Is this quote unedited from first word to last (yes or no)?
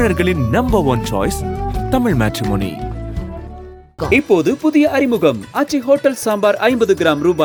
yes